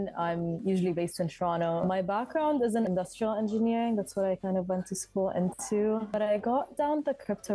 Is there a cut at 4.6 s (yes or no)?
no